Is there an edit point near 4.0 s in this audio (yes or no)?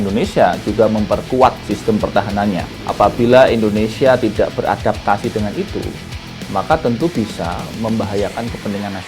no